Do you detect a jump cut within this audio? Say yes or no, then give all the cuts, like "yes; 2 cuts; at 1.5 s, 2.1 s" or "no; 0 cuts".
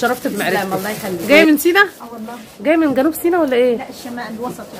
yes; 1 cut; at 1.1 s